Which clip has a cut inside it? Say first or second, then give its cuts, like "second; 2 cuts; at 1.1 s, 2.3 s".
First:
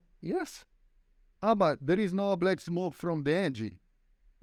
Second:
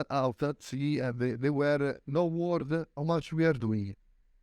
second; 2 cuts; at 2.0 s, 2.9 s